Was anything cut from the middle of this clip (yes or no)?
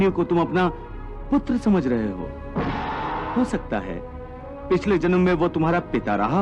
yes